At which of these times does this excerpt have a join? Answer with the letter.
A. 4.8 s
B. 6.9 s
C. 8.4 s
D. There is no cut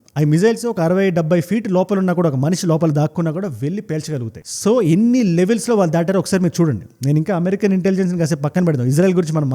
D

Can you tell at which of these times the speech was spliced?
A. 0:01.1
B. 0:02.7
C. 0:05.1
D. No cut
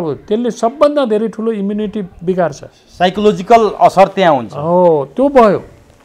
D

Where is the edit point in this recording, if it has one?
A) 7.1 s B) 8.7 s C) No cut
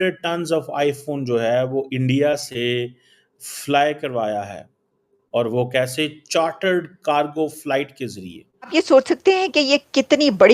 B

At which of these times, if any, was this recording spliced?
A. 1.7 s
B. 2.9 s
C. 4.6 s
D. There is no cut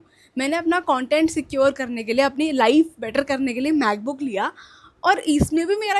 D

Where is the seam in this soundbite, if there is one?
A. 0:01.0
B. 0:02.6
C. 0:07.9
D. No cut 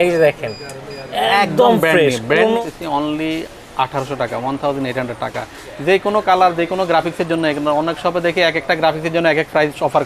B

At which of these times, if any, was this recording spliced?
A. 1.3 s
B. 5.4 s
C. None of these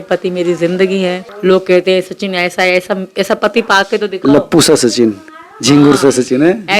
A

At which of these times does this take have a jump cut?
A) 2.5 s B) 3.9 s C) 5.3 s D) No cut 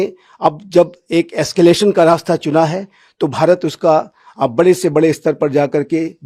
D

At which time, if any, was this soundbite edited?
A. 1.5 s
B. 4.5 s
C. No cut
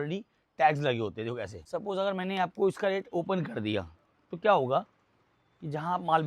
A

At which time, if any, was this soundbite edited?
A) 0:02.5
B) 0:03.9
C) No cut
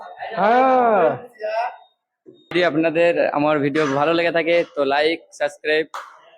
A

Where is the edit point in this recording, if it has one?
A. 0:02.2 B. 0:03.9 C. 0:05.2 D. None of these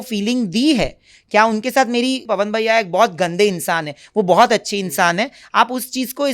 A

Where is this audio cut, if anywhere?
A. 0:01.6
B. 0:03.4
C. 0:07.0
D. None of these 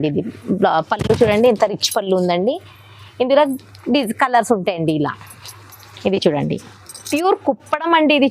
C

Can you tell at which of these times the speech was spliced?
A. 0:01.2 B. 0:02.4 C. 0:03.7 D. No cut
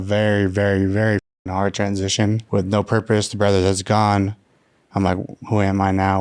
B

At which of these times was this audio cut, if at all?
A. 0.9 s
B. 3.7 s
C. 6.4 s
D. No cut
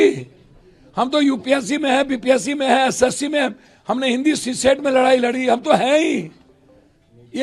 D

